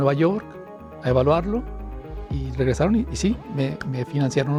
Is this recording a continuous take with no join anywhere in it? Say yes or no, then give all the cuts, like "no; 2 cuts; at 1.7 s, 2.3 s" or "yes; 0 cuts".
yes; 0 cuts